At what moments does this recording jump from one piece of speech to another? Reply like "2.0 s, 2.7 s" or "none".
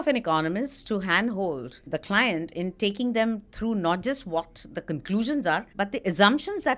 1.9 s, 5.7 s